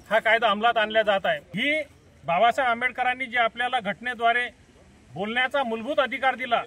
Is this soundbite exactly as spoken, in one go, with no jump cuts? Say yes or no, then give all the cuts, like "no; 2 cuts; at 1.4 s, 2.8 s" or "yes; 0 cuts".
no; 1 cut; at 1.5 s